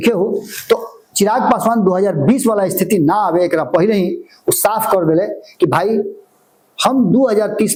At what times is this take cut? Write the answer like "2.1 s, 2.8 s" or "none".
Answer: none